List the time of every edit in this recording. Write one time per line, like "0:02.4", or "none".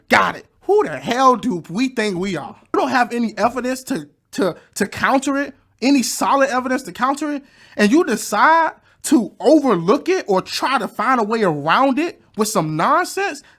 0:02.7